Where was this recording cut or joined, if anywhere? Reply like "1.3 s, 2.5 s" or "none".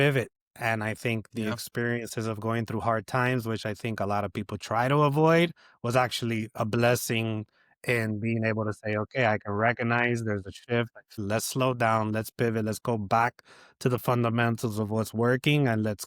11.2 s

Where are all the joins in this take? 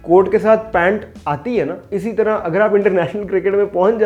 none

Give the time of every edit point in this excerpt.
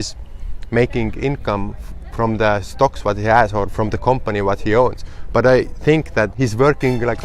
6.3 s

